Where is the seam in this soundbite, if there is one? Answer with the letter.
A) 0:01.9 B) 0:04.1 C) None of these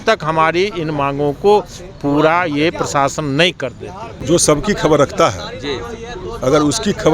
B